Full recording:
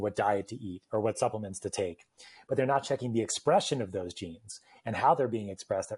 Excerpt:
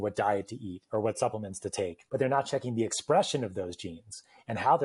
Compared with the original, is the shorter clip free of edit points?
no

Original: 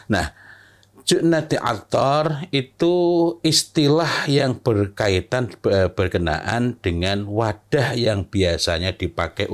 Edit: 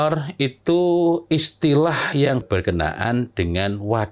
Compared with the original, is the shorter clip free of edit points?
no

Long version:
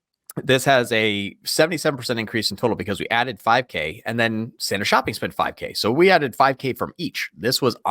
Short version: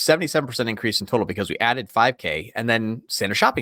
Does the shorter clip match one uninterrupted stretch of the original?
yes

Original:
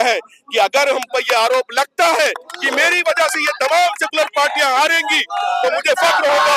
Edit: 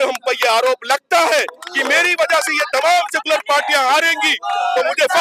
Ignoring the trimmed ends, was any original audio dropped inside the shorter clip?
no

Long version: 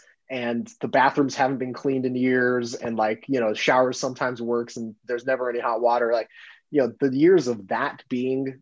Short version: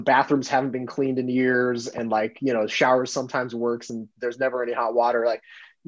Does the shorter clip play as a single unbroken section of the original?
yes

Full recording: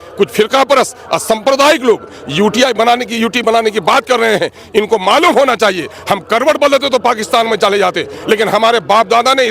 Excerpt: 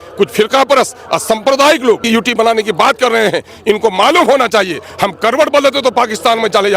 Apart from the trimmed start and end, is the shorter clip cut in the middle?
yes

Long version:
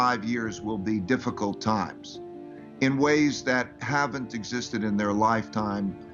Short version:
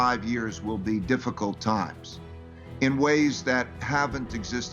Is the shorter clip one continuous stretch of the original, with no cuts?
yes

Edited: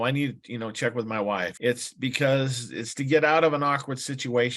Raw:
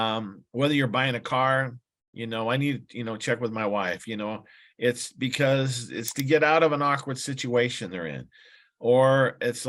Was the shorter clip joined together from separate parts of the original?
yes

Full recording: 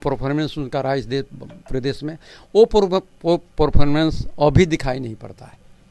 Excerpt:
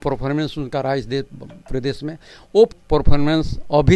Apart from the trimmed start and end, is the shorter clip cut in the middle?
yes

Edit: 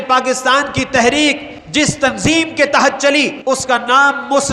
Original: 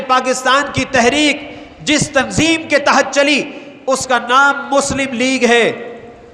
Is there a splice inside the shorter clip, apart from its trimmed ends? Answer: yes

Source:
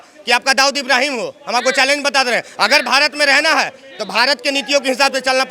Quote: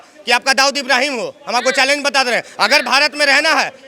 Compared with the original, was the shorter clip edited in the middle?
no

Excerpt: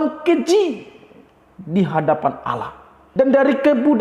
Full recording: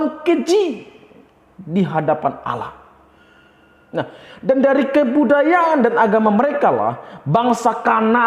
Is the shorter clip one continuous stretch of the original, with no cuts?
no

